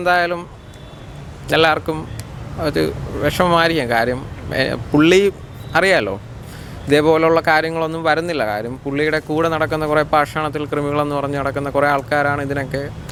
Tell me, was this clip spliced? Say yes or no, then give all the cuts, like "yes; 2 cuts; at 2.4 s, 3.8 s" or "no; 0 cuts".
no; 0 cuts